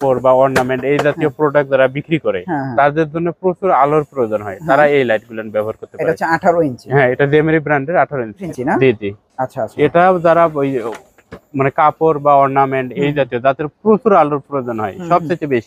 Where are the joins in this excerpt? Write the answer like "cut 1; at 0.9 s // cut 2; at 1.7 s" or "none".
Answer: cut 1; at 8.4 s